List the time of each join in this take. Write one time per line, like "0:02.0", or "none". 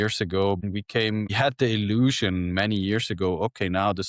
none